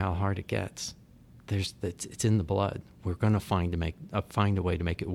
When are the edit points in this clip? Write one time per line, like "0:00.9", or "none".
none